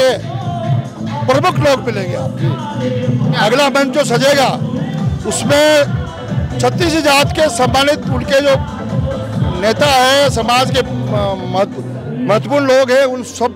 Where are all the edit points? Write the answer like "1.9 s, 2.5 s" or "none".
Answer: none